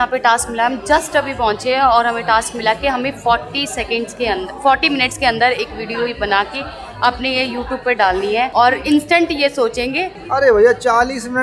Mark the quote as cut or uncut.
uncut